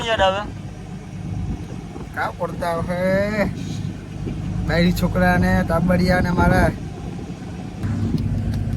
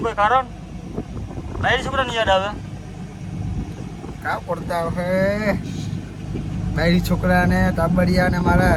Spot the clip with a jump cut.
first; 1 cut; at 7.9 s

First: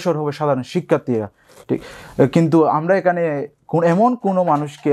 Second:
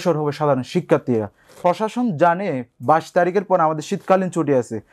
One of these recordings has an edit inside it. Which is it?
second; 1 cut; at 1.6 s

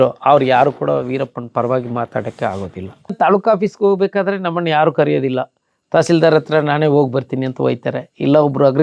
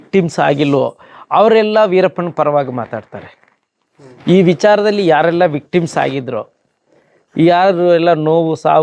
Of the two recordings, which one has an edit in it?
first; 1 cut; at 3.1 s

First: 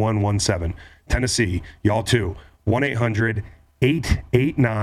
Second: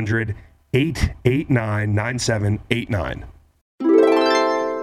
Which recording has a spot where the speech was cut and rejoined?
second; 1 cut; at 3.6 s

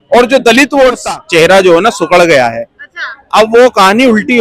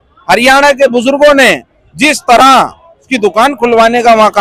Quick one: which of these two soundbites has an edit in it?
first; 1 cut; at 1.0 s

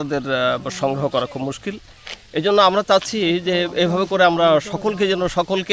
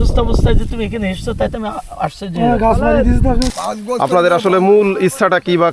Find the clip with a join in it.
second; 1 cut; at 3.5 s

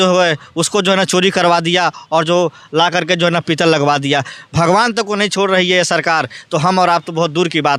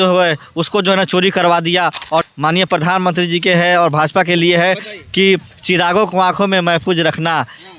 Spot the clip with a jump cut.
second; 1 cut; at 2.2 s

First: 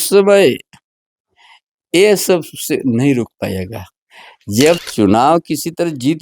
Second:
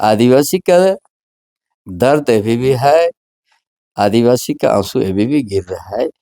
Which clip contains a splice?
first; 1 cut; at 4.8 s

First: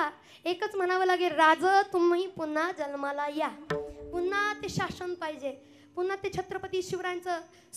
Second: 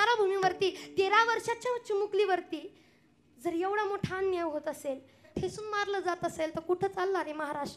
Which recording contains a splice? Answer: second; 1 cut; at 5.3 s

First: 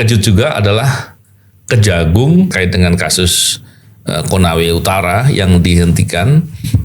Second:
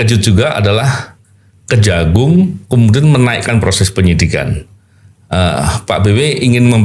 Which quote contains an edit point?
first; 1 cut; at 2.5 s

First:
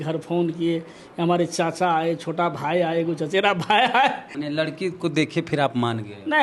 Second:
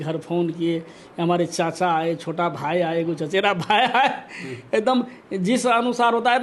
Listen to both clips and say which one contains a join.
first; 1 cut; at 4.3 s

